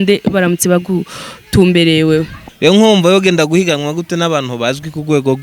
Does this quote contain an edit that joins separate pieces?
yes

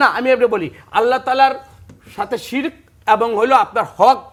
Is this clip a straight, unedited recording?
yes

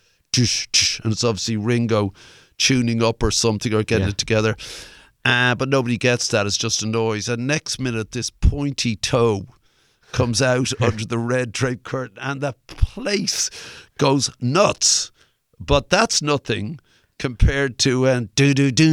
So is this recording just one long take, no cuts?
yes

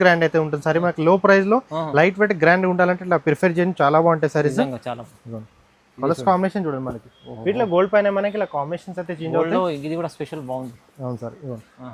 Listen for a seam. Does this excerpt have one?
no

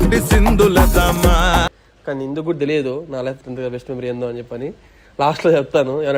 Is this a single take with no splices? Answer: yes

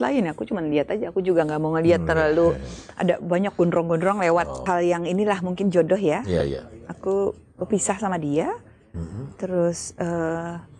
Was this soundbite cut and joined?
yes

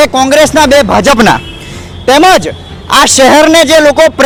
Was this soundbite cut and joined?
no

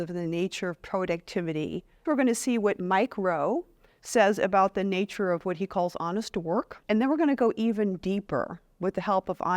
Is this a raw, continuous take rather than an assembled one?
no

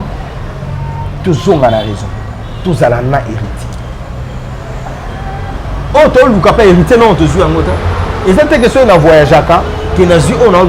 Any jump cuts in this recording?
no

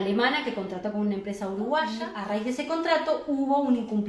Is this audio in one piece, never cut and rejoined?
no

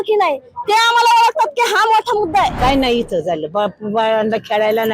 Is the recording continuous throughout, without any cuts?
no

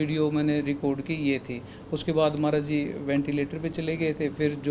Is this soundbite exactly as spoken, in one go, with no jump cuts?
yes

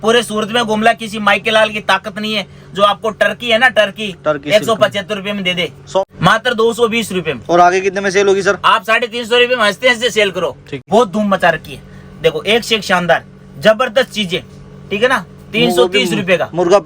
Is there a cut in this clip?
yes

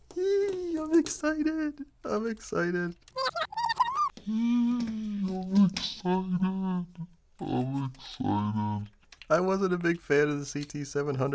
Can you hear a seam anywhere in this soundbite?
no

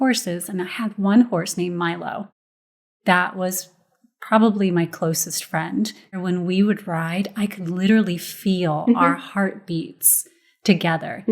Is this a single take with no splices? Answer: no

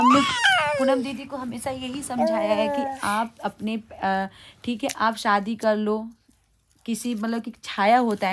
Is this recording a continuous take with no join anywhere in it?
yes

